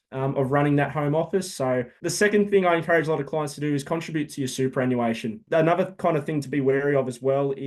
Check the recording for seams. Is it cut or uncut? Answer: cut